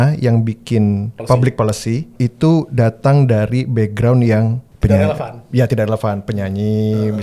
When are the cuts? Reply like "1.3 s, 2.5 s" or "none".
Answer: 1.1 s, 2.1 s, 4.6 s